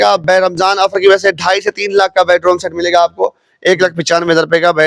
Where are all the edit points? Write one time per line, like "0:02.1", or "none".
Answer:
none